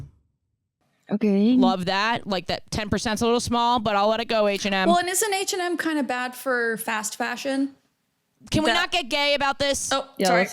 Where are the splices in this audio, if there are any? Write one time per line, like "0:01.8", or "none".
0:01.7